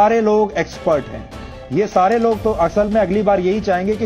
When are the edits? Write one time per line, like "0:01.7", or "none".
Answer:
none